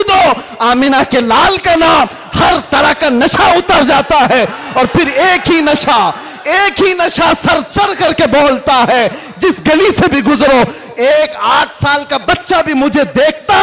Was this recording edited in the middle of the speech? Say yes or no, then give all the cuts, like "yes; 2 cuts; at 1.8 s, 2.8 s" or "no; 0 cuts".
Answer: no; 0 cuts